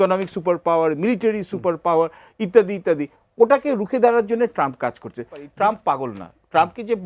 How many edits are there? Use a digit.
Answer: 1